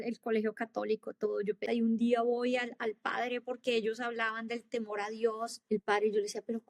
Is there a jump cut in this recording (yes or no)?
yes